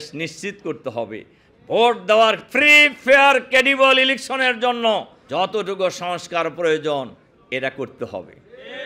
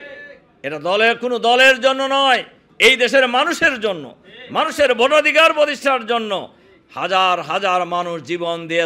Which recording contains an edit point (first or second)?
first